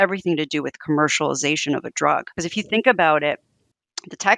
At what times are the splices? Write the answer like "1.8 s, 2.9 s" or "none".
2.4 s